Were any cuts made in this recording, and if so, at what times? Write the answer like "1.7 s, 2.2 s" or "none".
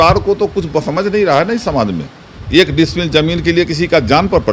2.4 s